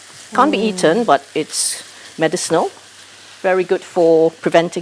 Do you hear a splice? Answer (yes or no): no